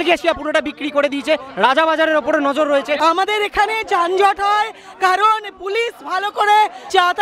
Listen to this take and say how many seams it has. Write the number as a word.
one